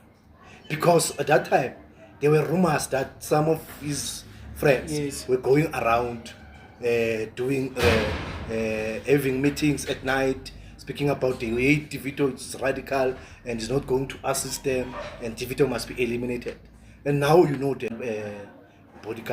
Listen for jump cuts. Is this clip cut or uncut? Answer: cut